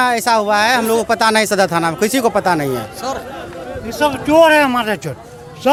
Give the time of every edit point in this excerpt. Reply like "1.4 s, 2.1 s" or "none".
none